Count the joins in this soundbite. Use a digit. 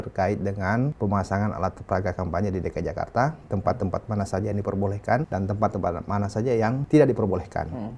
3